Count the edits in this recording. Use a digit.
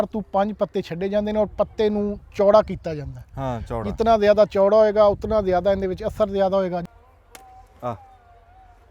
1